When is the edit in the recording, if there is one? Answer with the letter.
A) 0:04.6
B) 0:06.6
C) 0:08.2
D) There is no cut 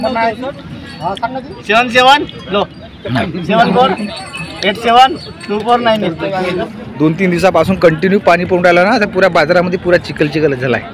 B